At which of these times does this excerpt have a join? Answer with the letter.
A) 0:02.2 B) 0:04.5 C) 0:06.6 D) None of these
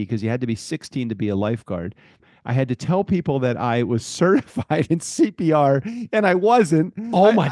A